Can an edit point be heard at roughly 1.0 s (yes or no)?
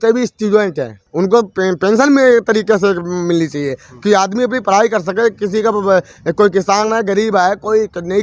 yes